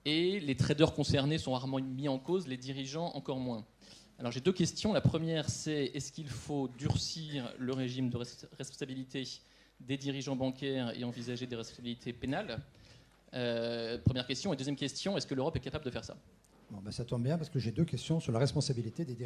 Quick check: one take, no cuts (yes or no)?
no